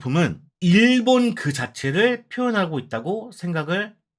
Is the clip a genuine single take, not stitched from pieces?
yes; 0 cuts

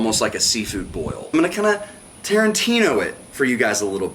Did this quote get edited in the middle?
yes; 1 cut; at 1.3 s

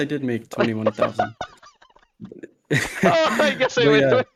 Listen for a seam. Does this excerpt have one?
no; 0 cuts

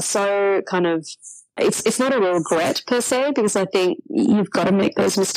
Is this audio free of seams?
no; 1 cut; at 1.5 s

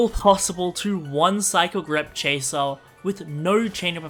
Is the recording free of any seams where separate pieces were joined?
yes; 0 cuts

